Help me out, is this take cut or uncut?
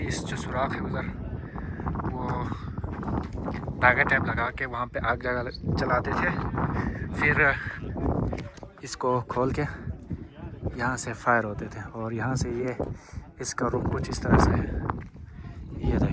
uncut